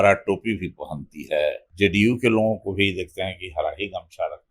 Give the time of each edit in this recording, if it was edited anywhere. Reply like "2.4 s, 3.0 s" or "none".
1.7 s